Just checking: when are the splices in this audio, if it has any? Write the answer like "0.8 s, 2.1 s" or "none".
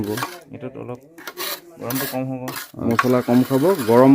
2.9 s